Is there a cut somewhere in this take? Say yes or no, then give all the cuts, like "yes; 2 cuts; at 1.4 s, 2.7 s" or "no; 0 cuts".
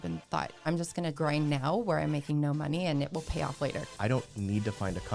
yes; 2 cuts; at 1.0 s, 3.9 s